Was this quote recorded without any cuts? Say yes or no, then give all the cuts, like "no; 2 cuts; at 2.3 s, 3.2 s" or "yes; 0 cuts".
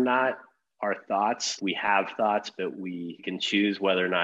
no; 2 cuts; at 1.5 s, 3.2 s